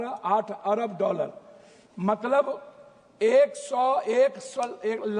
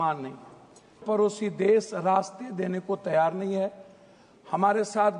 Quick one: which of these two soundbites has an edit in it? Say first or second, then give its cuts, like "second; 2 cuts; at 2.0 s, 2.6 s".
second; 1 cut; at 0.9 s